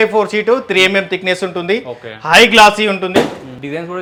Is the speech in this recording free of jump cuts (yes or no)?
yes